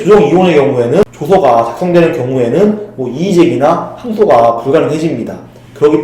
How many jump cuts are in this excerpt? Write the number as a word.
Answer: one